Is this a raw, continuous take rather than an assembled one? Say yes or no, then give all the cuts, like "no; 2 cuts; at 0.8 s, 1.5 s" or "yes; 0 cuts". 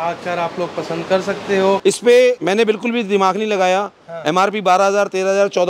no; 1 cut; at 1.8 s